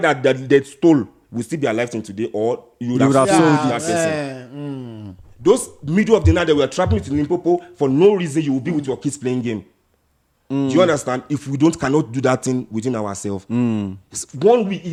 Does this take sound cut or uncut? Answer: uncut